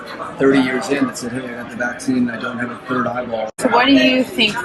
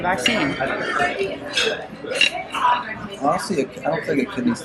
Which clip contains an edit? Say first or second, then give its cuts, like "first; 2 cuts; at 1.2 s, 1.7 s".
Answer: first; 1 cut; at 3.5 s